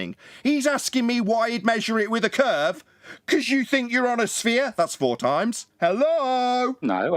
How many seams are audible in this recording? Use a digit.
0